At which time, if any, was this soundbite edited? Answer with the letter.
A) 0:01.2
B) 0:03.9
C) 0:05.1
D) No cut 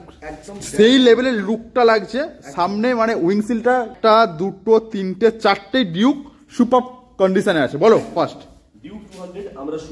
B